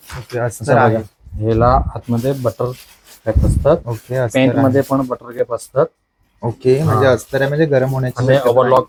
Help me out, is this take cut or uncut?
uncut